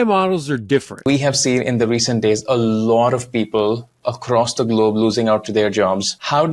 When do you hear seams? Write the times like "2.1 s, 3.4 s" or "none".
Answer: 1.0 s